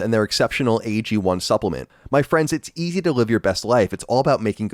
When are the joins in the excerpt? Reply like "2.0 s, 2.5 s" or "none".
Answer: 1.9 s